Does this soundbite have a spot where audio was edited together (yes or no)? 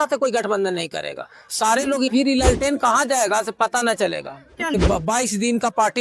yes